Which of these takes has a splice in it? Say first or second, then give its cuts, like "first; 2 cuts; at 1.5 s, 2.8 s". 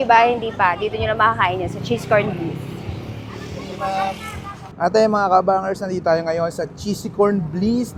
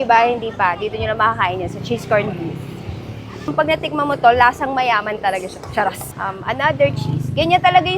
second; 2 cuts; at 3.5 s, 6.1 s